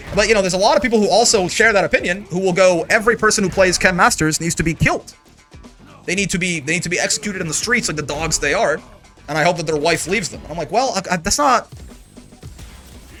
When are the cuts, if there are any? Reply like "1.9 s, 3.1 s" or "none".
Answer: none